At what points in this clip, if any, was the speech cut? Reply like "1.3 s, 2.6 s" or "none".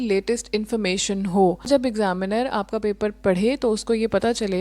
1.7 s